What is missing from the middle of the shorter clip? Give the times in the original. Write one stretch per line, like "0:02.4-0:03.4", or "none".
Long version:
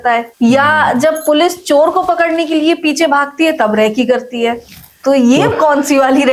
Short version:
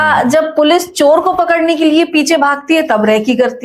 none